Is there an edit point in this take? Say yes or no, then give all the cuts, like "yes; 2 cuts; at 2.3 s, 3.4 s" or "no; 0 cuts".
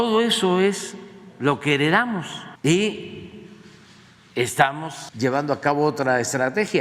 yes; 2 cuts; at 2.4 s, 5.0 s